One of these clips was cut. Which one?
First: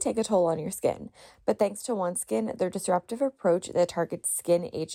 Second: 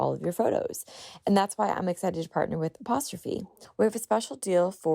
second; 1 cut; at 3.6 s

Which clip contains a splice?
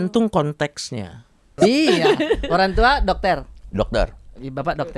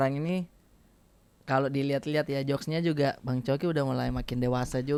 first; 1 cut; at 1.6 s

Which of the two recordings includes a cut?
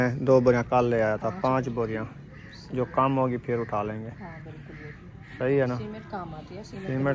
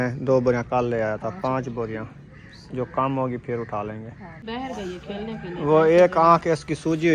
second; 1 cut; at 4.4 s

